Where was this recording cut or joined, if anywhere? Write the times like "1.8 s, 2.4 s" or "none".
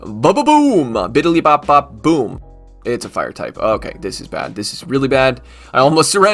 2.5 s